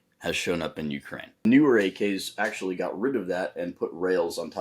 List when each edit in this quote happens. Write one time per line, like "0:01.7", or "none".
0:01.4

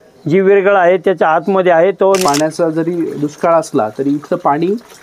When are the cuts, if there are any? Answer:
0:02.2

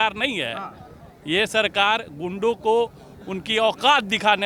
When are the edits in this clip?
none

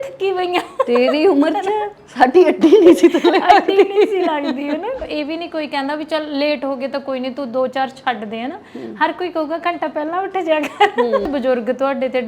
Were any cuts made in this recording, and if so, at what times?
0:05.0
0:11.3

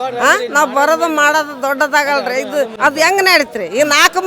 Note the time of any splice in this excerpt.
0:02.7

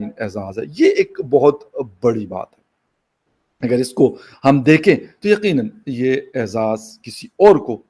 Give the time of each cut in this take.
none

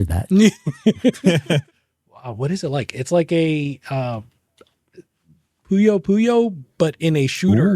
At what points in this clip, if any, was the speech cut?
0:01.6

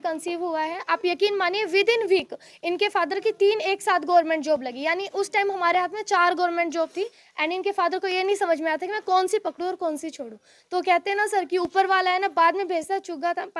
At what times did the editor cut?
none

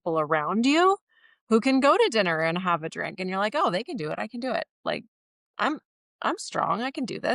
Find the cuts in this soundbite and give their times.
none

